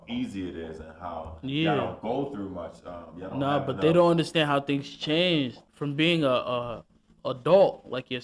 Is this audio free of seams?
no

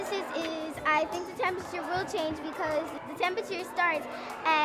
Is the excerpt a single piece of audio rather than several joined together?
yes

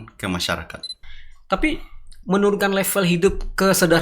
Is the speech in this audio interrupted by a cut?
yes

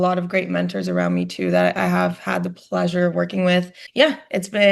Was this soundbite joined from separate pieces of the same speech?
yes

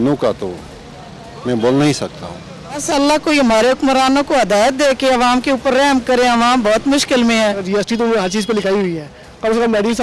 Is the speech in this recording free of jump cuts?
no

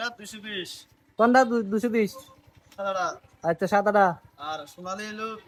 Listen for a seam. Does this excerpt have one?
no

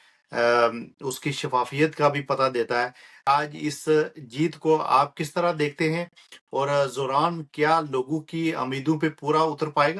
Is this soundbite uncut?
no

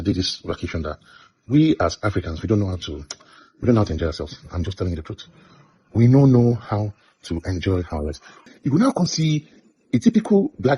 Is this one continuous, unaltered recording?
no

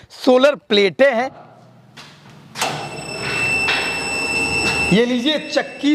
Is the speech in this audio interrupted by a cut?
yes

